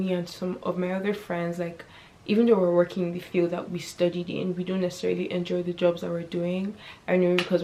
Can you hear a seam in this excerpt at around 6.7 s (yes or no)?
no